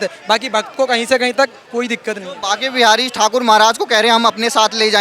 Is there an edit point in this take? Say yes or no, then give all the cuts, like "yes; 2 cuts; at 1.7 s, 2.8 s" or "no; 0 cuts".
no; 0 cuts